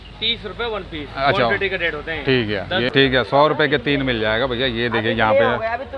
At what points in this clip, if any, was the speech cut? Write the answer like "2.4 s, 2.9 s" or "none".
2.9 s